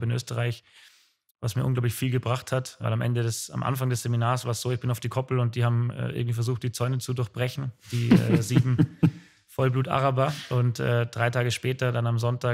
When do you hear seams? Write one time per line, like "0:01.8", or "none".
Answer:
0:02.8